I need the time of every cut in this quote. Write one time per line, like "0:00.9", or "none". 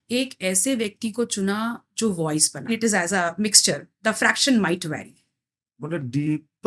0:02.7